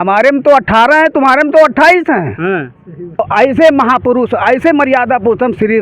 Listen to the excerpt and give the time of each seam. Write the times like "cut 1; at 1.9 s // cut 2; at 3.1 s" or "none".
cut 1; at 3.2 s